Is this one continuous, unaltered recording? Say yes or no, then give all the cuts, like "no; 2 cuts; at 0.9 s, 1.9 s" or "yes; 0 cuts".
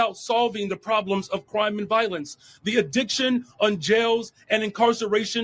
no; 1 cut; at 2.4 s